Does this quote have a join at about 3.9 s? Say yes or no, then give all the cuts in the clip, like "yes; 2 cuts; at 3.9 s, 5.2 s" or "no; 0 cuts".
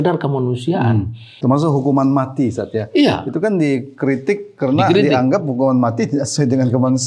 no; 1 cut; at 1.2 s